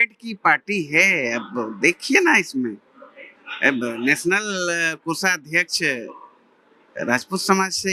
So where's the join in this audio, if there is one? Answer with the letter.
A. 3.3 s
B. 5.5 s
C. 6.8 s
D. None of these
D